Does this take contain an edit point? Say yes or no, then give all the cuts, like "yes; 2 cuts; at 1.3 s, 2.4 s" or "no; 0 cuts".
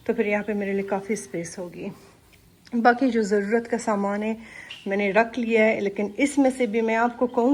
no; 0 cuts